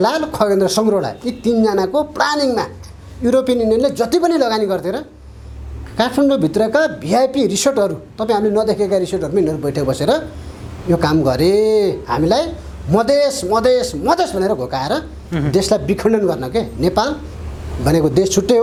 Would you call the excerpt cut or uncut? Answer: uncut